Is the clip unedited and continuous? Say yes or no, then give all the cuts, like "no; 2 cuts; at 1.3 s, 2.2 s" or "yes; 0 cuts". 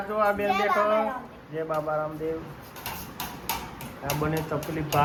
yes; 0 cuts